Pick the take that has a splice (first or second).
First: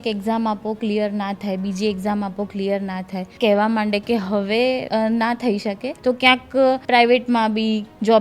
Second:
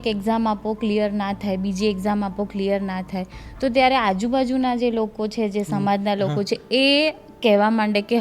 first